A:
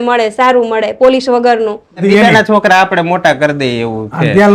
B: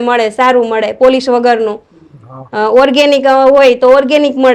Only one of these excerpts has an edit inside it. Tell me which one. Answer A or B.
A